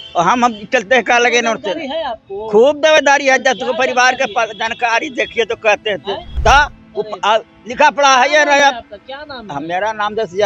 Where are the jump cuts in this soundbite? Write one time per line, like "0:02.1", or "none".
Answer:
0:06.3